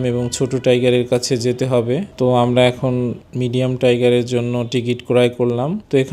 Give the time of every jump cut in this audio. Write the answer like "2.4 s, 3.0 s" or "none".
none